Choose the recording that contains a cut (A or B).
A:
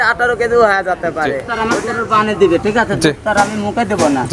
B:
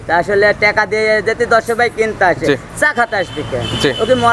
A